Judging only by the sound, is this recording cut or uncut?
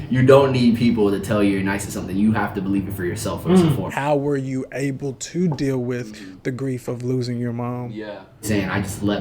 cut